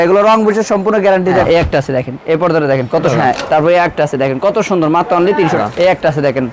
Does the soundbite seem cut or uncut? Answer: cut